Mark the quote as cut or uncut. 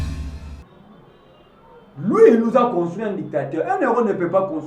uncut